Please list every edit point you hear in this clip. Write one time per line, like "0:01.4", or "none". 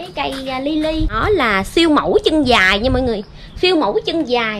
0:01.2